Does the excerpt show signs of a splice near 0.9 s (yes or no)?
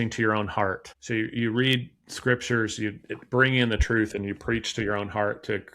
yes